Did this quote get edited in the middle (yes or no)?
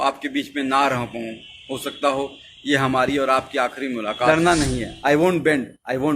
yes